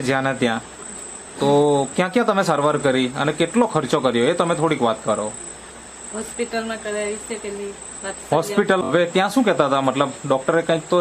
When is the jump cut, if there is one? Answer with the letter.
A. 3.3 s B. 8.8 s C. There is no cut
B